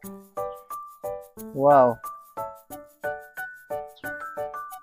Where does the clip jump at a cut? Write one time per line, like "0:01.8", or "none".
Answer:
none